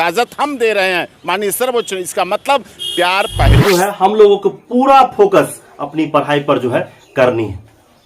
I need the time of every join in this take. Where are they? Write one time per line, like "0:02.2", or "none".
0:03.6